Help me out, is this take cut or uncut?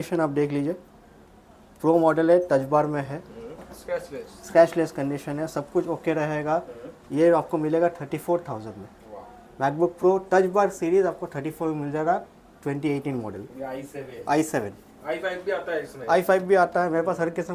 uncut